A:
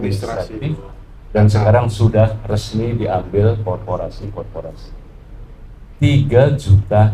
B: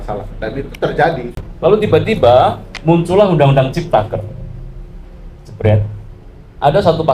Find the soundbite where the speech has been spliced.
B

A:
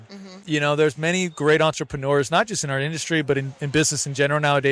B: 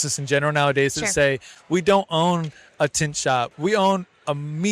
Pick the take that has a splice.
B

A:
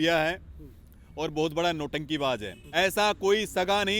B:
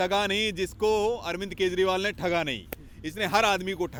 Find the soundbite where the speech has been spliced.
A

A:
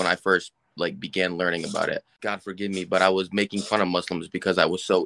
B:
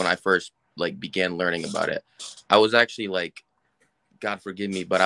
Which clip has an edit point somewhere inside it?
A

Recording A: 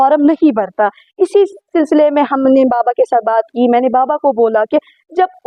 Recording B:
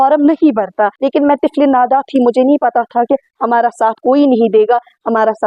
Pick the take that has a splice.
B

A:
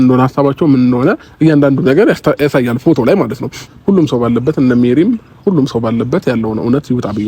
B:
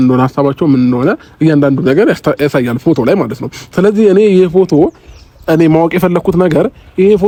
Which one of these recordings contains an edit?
A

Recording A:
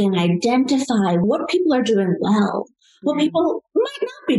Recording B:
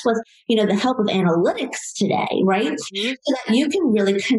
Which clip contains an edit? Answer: A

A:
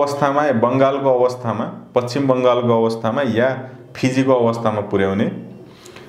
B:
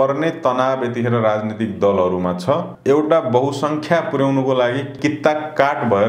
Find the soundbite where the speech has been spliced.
B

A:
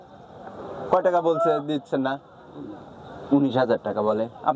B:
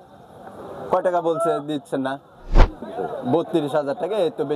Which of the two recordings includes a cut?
B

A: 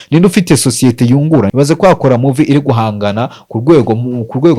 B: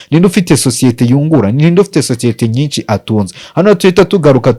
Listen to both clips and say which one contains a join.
A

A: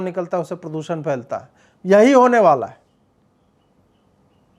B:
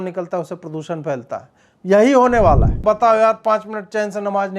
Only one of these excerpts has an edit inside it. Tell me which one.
B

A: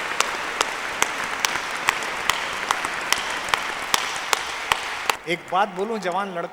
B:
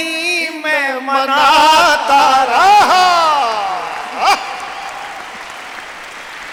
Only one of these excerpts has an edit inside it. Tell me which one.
A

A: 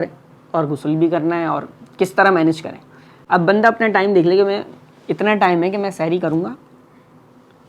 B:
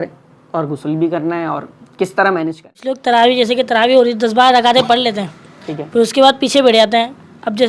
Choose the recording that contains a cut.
B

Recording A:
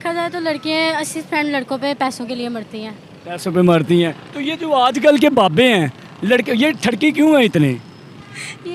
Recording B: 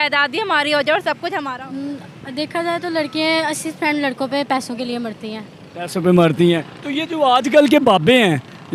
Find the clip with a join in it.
B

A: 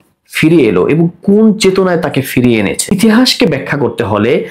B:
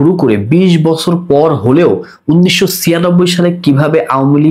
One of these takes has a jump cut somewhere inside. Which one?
A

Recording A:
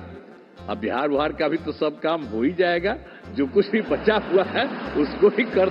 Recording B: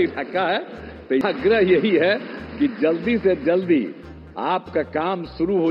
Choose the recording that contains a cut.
B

